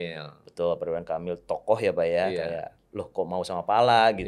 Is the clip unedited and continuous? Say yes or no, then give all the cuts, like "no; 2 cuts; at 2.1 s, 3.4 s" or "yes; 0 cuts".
yes; 0 cuts